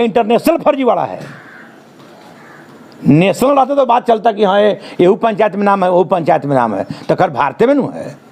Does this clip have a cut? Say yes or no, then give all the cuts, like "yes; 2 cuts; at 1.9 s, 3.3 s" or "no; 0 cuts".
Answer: no; 0 cuts